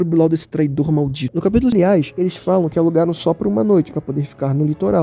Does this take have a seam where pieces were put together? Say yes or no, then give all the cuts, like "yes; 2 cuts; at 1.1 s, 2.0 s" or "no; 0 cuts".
yes; 1 cut; at 1.7 s